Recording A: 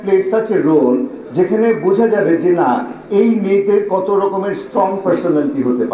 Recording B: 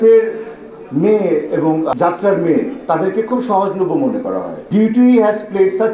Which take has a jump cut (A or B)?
B